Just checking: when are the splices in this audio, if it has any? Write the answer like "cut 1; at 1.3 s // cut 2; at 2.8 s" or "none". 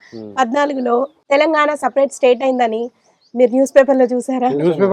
cut 1; at 1.2 s